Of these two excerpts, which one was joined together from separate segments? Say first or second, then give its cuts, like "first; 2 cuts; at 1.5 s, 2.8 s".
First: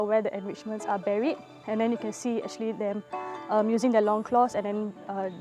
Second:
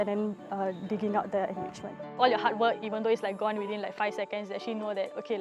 second; 1 cut; at 2.1 s